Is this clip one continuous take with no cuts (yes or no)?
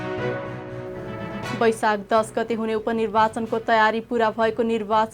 no